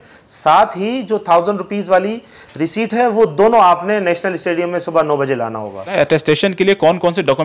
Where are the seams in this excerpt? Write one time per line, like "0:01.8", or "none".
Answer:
0:05.9